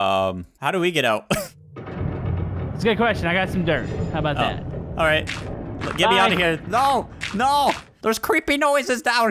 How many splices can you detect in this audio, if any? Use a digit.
1